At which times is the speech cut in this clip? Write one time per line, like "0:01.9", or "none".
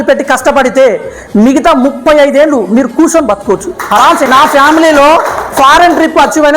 0:04.3